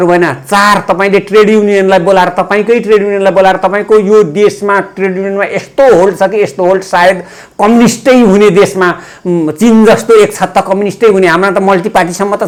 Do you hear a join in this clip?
no; 0 cuts

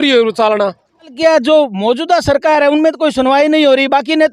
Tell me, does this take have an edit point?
yes; 1 cut; at 1.1 s

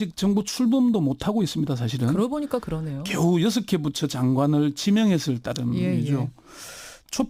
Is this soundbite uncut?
yes; 0 cuts

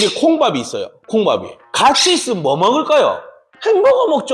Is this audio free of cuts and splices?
yes; 0 cuts

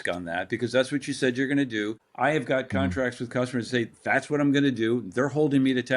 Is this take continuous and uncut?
no; 1 cut; at 2.0 s

